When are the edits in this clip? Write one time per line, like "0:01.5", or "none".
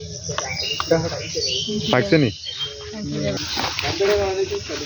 0:03.4